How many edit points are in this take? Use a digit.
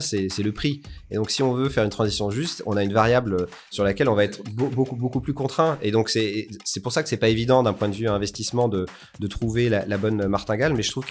1